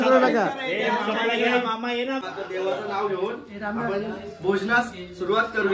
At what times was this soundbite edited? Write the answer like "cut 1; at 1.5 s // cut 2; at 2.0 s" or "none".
cut 1; at 2.2 s